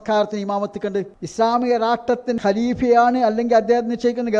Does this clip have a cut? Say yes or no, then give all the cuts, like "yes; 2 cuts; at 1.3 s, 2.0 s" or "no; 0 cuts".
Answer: yes; 2 cuts; at 1.2 s, 2.4 s